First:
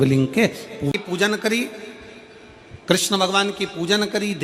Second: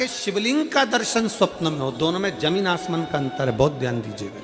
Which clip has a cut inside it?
first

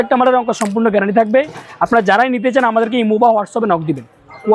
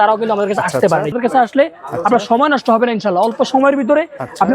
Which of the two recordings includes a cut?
second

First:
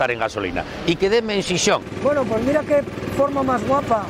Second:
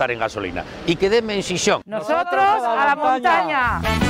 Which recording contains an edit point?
first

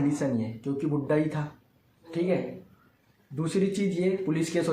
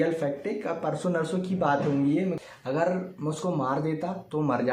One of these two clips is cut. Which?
second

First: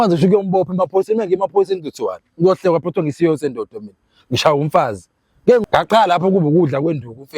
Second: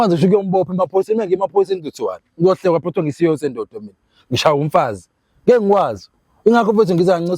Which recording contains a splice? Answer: first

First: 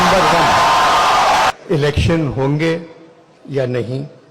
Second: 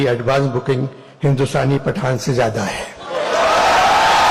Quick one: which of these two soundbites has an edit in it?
first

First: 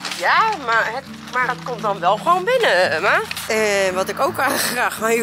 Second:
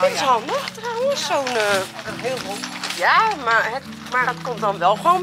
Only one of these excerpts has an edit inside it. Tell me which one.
first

